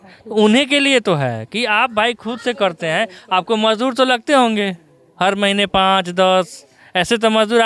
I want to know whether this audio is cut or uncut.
uncut